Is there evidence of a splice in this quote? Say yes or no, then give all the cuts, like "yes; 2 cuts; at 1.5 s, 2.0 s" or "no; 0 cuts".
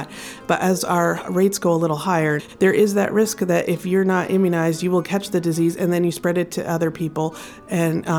yes; 1 cut; at 2.5 s